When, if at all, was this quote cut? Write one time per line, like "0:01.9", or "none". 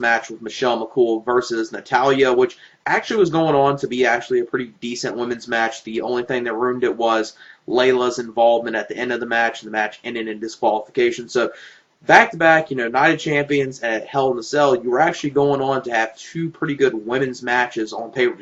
0:10.7

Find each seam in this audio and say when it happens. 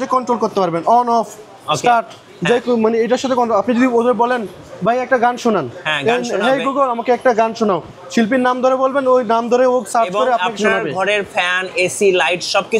none

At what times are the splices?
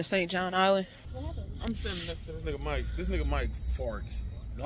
0:01.1

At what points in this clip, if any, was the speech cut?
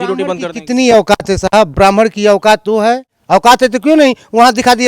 0:03.1

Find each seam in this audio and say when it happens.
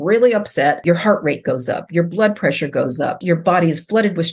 0:00.8
0:03.2

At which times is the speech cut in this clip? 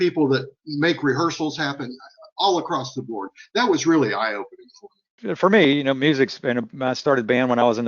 0:05.2

